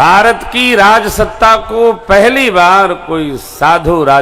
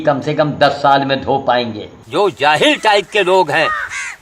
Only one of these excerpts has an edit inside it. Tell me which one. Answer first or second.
second